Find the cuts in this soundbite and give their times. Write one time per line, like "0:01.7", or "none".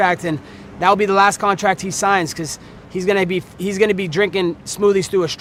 none